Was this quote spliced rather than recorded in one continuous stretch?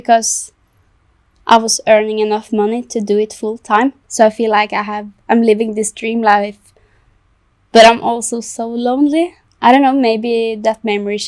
yes; 2 cuts; at 4.0 s, 9.4 s

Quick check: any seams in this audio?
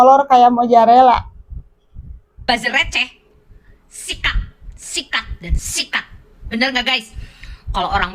yes; 1 cut; at 2.2 s

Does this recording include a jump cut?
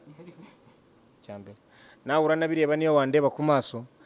yes; 1 cut; at 1.2 s

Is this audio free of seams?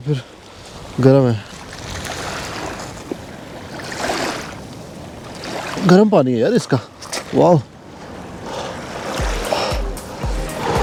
yes; 0 cuts

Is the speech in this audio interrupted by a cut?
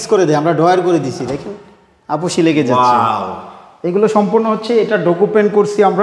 no; 0 cuts

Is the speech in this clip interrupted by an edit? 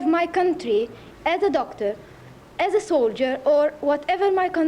yes; 1 cut; at 1.0 s

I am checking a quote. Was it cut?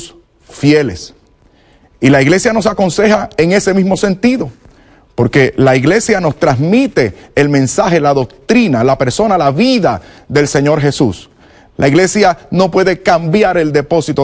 yes; 1 cut; at 5.3 s

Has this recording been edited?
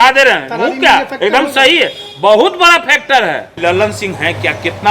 yes; 1 cut; at 3.6 s

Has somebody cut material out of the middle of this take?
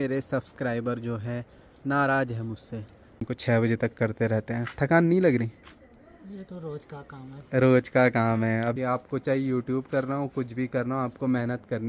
yes; 2 cuts; at 3.3 s, 8.7 s

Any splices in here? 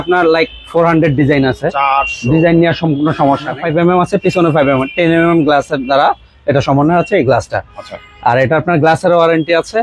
yes; 1 cut; at 3.6 s

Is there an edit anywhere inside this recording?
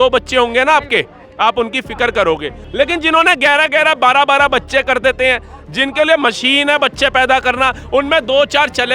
yes; 1 cut; at 2.6 s

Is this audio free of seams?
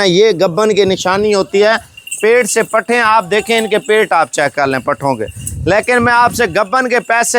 yes; 0 cuts

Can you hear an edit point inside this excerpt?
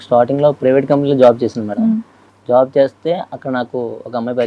no; 0 cuts

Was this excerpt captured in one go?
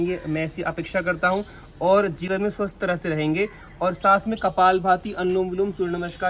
yes; 0 cuts

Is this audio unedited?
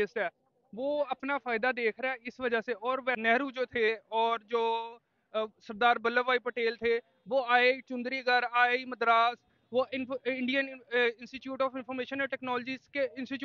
no; 1 cut; at 3.2 s

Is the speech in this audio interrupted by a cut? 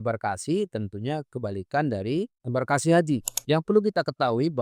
yes; 1 cut; at 3.3 s

